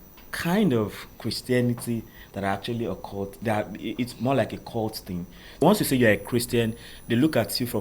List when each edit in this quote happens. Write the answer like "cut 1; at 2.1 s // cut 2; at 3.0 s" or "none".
cut 1; at 5.6 s